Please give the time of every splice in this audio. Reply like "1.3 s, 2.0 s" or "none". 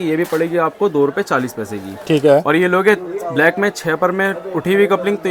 none